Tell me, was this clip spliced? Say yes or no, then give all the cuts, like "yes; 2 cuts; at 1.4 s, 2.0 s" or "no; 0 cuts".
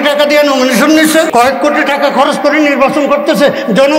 yes; 1 cut; at 1.3 s